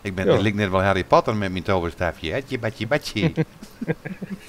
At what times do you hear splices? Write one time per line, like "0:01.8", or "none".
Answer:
none

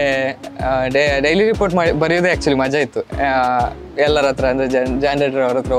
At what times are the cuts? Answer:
none

